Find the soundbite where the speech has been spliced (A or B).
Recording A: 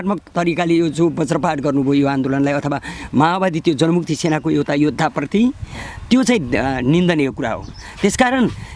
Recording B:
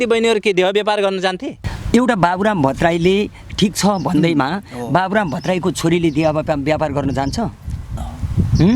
B